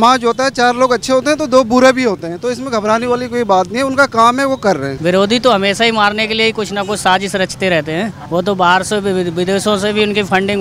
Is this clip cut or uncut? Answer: cut